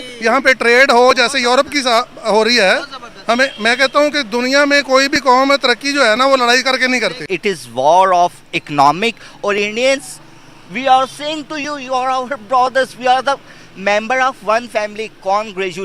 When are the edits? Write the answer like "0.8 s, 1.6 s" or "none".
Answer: 7.3 s